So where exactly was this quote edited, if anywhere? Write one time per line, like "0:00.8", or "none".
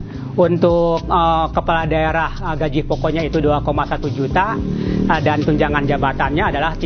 none